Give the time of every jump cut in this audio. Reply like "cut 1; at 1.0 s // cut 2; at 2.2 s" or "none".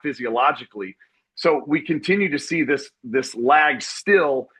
none